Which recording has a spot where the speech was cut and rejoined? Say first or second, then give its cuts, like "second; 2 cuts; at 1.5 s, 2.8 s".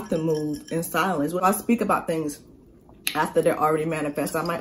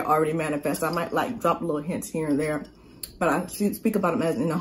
first; 1 cut; at 1.4 s